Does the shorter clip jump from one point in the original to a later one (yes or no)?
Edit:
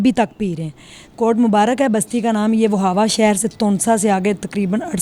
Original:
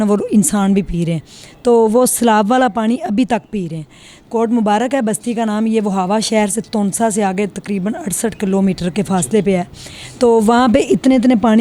no